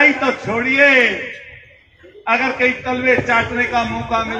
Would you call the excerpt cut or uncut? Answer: uncut